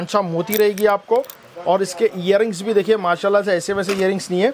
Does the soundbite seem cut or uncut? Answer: uncut